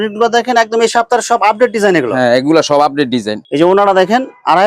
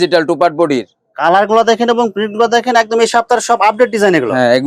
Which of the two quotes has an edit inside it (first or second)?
first